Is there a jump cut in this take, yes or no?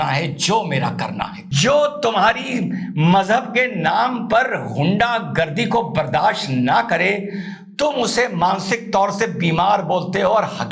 yes